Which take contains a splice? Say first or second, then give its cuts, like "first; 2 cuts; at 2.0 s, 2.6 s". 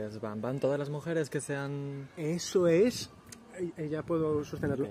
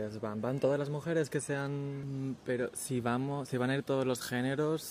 second; 1 cut; at 2.0 s